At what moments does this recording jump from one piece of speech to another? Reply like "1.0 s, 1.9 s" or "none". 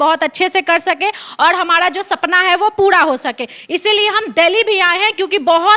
none